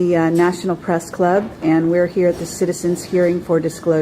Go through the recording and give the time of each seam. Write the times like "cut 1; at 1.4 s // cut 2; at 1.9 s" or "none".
none